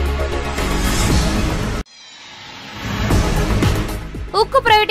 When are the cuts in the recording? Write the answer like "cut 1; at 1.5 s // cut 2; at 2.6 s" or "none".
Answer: cut 1; at 1.1 s // cut 2; at 3.8 s